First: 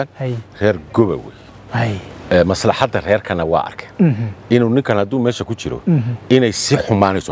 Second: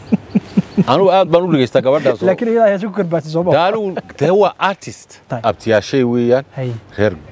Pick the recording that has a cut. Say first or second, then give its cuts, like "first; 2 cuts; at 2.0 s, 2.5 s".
second; 1 cut; at 5.2 s